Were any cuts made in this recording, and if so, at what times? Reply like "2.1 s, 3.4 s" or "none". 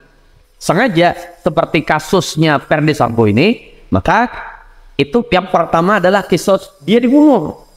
none